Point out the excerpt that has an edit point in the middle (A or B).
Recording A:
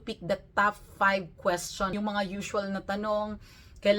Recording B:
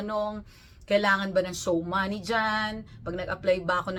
A